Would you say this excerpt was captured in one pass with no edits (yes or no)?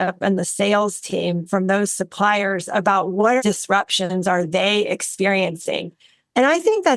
no